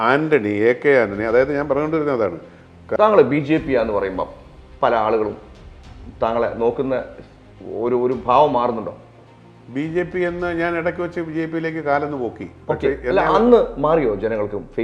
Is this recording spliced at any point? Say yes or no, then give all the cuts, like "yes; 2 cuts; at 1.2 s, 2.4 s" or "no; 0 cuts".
yes; 1 cut; at 2.8 s